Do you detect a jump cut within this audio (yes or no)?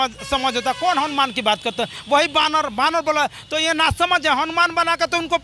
no